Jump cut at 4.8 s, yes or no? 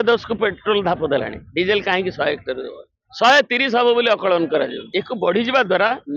yes